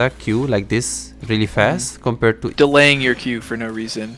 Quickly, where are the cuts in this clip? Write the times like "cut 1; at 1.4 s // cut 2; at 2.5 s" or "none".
cut 1; at 2.5 s